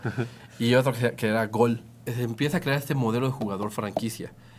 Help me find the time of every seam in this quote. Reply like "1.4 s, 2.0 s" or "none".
2.1 s

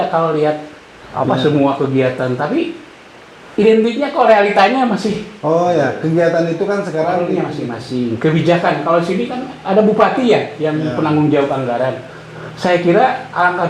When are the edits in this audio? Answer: 7.2 s

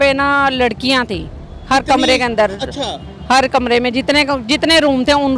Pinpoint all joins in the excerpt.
none

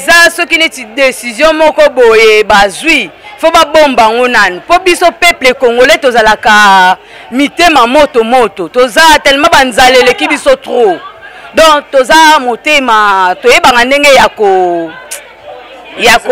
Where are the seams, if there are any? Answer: none

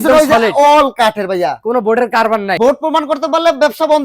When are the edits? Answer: 2.5 s

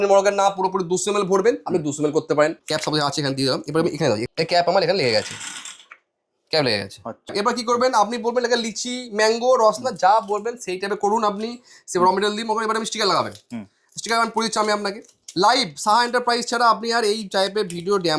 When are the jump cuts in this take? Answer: 2.6 s, 4.2 s, 7.3 s

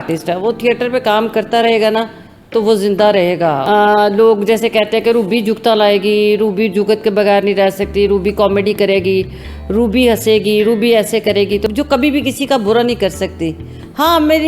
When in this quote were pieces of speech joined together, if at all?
3.6 s, 11.7 s

